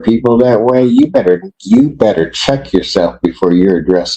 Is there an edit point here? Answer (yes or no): no